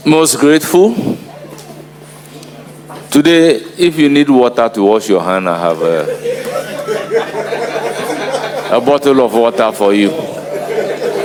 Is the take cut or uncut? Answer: uncut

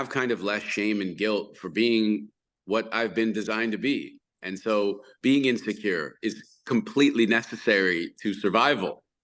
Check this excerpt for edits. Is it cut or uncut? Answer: uncut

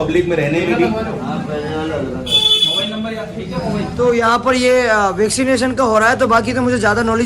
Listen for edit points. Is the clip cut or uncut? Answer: cut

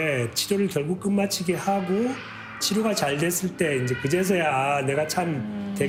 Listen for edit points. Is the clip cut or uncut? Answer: uncut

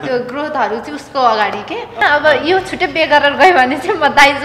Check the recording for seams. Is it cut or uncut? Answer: cut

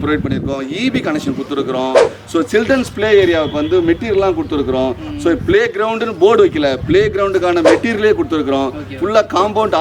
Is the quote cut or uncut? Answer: uncut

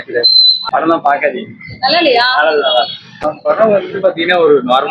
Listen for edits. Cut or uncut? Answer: cut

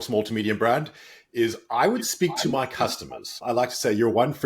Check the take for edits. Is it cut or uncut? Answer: cut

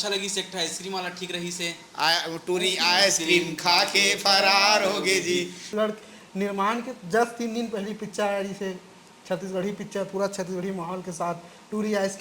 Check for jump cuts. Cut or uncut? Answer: cut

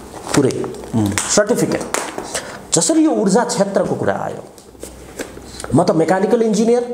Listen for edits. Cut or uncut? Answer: uncut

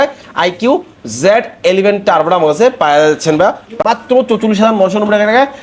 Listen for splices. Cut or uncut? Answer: cut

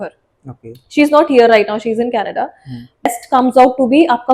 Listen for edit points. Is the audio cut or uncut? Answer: cut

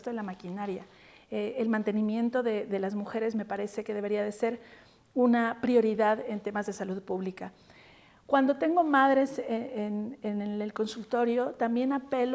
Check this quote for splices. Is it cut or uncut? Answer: uncut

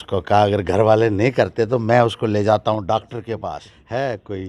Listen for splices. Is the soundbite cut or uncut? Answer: cut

